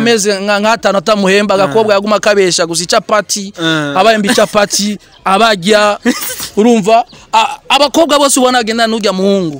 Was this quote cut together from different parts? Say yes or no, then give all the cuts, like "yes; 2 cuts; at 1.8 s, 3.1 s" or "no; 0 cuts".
no; 0 cuts